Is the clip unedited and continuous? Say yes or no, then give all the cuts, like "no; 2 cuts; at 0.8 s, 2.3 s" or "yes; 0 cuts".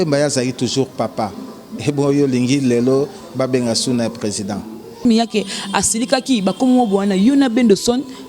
no; 1 cut; at 5.0 s